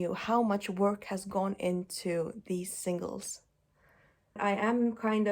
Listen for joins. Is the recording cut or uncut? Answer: cut